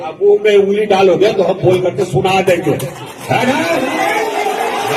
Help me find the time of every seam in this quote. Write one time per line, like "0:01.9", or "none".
none